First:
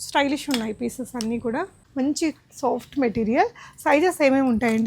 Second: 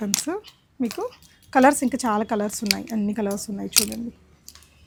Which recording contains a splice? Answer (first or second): first